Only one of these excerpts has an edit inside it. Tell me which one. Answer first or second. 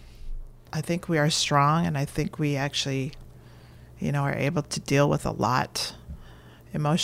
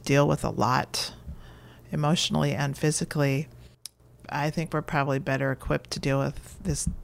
second